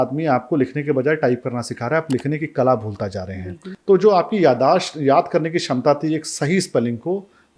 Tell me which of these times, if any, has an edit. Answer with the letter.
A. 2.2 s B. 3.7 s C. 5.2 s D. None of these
B